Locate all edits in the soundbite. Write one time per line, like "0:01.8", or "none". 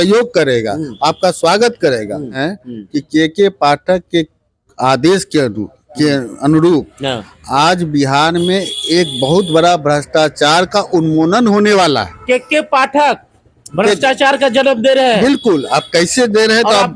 0:02.5

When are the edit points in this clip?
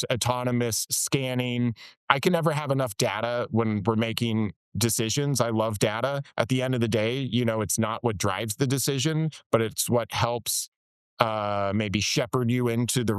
0:02.0

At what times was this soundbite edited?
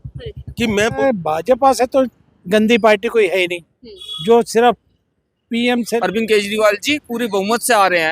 0:01.0
0:06.0

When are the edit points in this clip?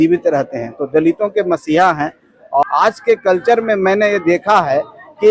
0:02.6

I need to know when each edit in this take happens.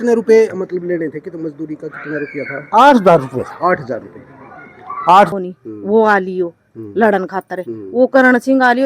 0:05.3

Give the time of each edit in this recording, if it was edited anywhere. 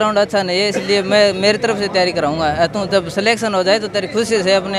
none

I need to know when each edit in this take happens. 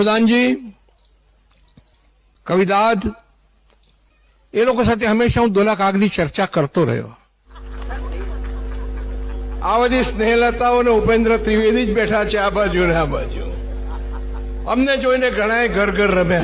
0:07.7

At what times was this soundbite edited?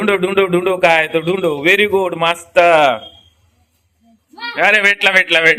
none

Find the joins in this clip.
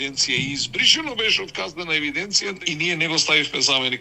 0:02.6

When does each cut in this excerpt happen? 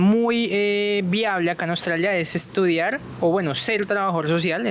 none

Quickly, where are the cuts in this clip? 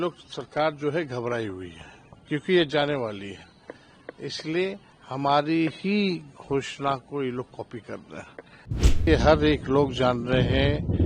0:09.0

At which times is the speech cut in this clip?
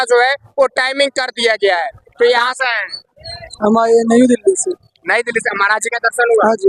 0:02.5

